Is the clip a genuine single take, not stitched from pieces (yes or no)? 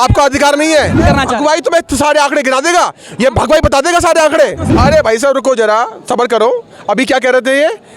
no